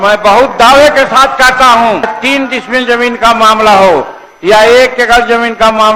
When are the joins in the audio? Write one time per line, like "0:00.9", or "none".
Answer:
0:02.1